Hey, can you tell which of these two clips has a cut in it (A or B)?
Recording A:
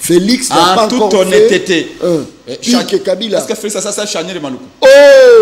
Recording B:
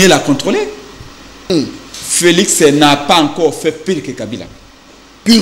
B